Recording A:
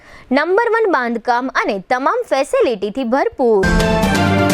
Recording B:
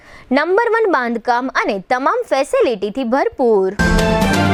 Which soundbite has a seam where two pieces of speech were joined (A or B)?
A